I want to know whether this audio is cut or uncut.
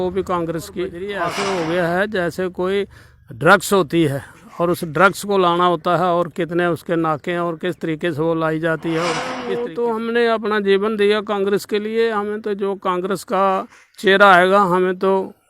cut